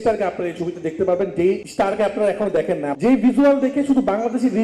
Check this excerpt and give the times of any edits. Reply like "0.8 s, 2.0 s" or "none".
1.7 s, 2.9 s